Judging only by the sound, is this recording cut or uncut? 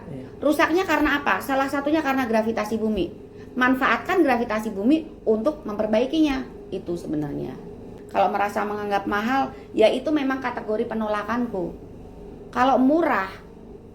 cut